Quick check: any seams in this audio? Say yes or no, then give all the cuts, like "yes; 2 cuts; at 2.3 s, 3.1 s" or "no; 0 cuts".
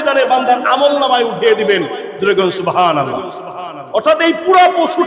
no; 0 cuts